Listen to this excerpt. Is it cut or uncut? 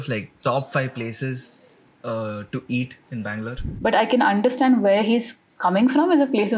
cut